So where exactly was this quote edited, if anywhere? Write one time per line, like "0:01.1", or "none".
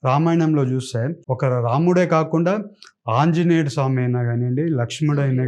0:01.2